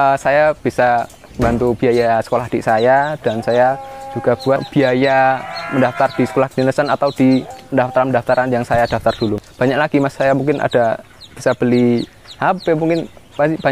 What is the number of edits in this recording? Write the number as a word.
four